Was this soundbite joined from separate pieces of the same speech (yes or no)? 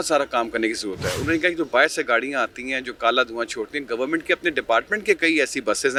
no